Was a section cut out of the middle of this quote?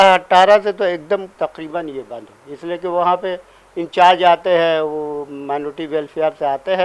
no; 0 cuts

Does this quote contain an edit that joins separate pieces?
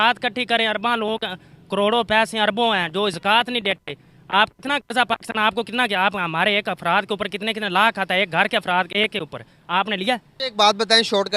yes; 1 cut; at 10.4 s

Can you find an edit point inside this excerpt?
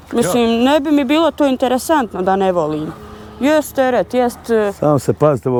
no; 0 cuts

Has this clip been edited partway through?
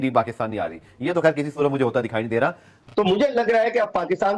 yes; 1 cut; at 2.9 s

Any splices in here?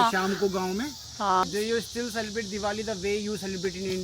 yes; 1 cut; at 1.4 s

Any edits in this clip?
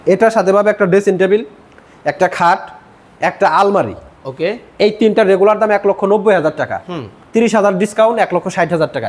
no; 0 cuts

